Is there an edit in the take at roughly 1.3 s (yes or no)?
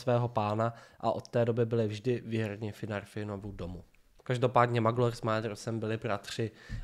no